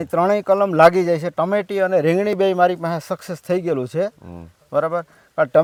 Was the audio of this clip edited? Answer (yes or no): no